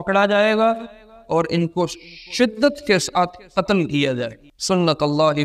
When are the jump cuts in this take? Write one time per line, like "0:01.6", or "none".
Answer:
0:04.5